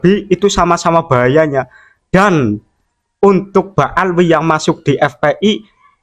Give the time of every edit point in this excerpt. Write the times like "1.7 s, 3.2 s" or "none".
none